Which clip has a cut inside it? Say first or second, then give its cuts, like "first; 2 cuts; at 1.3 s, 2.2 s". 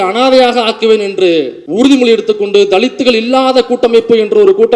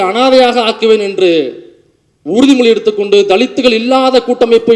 first; 1 cut; at 1.6 s